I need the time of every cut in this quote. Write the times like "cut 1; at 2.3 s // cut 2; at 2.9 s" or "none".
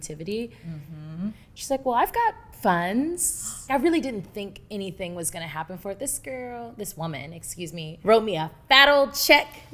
cut 1; at 3.7 s // cut 2; at 7.9 s